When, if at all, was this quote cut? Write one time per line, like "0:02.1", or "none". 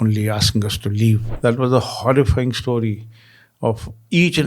0:01.3